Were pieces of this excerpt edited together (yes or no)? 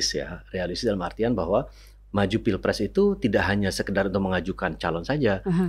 no